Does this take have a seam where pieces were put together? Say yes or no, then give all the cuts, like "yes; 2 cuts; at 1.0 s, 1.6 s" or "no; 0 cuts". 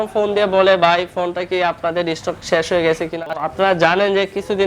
yes; 1 cut; at 3.4 s